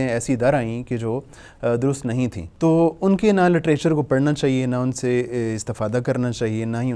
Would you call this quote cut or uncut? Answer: cut